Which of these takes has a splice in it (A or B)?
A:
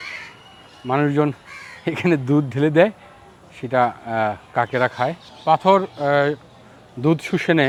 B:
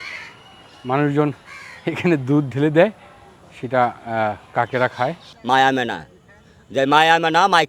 B